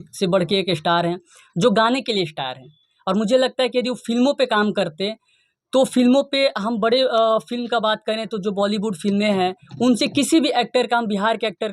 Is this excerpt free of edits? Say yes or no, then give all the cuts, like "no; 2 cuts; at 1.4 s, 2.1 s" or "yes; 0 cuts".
yes; 0 cuts